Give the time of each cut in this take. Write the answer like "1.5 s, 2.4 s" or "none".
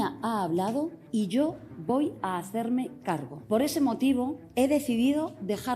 1.0 s, 3.3 s, 4.4 s

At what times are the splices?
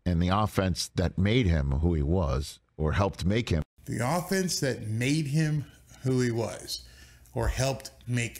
none

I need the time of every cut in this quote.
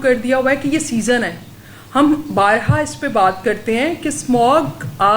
none

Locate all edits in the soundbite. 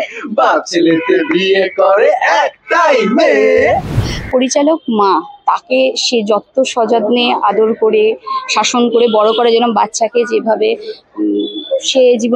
4.0 s

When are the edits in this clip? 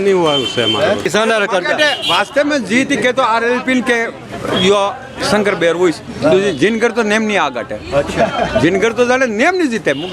1.0 s

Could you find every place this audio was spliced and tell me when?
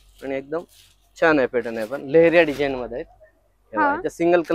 none

